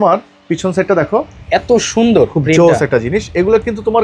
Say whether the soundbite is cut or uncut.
uncut